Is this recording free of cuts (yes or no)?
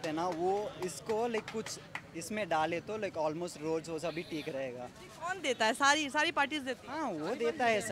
yes